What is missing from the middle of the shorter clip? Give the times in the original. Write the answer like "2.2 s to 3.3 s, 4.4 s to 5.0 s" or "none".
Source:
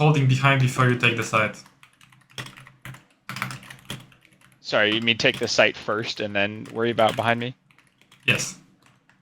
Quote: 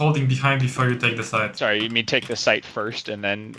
1.5 s to 4.6 s